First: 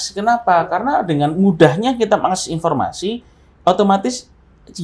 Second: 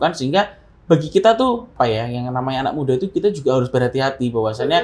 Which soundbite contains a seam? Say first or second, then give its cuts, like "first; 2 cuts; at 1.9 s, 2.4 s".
second; 1 cut; at 1.7 s